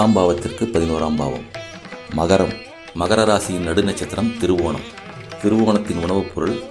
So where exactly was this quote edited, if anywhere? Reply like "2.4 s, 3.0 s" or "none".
none